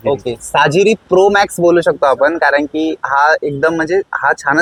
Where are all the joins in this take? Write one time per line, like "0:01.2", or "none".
none